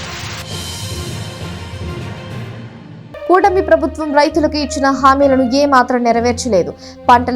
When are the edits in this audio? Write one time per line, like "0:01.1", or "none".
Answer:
0:02.6